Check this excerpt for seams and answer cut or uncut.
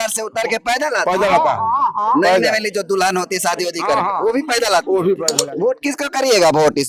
cut